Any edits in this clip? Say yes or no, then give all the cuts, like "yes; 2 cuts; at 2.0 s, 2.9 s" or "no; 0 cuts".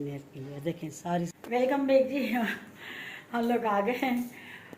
yes; 1 cut; at 1.4 s